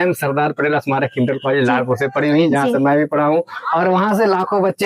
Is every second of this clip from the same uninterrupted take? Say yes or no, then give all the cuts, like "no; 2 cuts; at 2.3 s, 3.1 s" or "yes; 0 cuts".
yes; 0 cuts